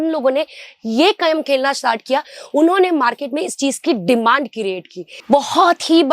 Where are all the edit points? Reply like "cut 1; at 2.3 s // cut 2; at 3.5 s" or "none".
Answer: cut 1; at 5.1 s